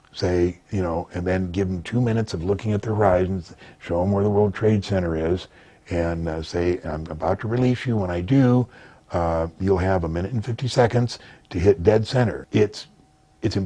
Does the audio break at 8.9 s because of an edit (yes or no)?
no